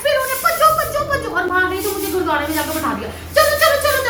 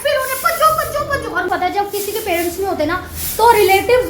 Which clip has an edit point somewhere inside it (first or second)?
second